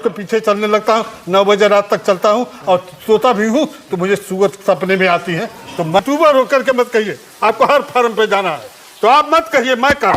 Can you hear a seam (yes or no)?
yes